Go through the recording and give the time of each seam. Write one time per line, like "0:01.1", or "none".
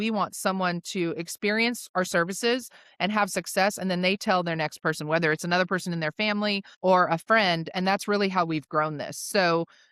0:06.7

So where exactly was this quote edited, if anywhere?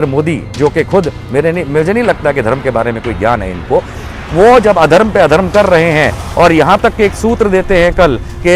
none

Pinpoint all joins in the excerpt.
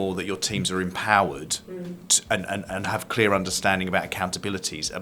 none

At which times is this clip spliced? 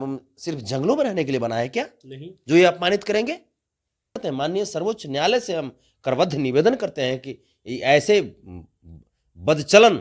0:04.2

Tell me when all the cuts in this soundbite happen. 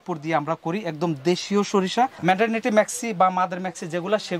0:02.2

